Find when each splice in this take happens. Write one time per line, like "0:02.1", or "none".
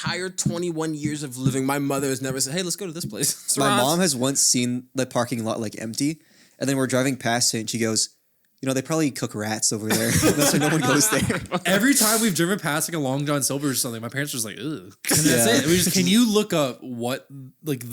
0:03.5
0:11.5
0:15.9